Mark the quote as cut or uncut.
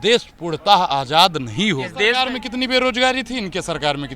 cut